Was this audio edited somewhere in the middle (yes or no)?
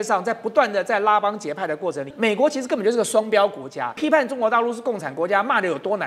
yes